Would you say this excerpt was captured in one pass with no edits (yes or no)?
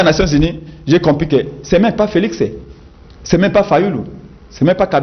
yes